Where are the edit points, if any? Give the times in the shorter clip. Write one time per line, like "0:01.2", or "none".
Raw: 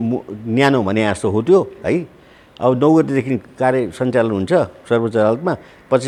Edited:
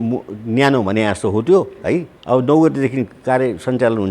0:02.1